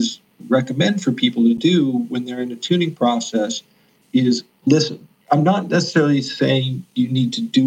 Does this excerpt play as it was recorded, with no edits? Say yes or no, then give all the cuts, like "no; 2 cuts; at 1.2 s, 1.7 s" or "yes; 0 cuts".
yes; 0 cuts